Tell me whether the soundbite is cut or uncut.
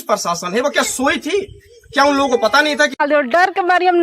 cut